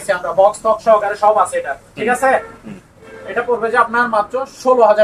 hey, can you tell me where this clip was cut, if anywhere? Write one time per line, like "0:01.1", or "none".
none